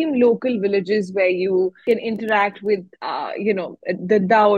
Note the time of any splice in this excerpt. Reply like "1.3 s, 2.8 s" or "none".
1.8 s, 3.0 s